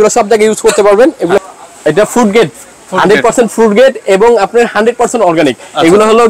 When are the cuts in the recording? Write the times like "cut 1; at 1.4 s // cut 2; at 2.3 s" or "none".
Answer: cut 1; at 1.4 s